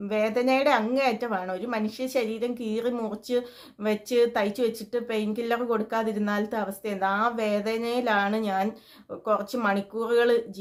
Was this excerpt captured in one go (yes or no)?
yes